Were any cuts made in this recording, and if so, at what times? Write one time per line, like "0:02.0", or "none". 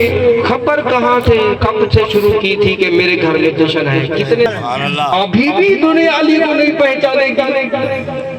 0:04.5